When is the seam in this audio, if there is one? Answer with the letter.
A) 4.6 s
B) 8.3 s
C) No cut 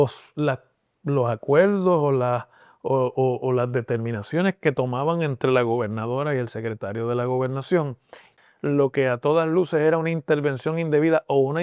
B